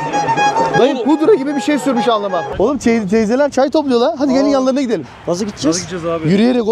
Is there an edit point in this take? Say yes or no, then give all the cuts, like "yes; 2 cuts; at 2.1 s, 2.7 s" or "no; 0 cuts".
yes; 1 cut; at 2.5 s